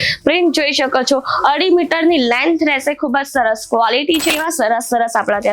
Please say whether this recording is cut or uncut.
cut